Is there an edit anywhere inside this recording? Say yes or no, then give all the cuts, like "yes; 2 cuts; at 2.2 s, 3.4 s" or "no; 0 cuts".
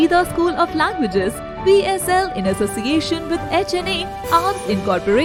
no; 0 cuts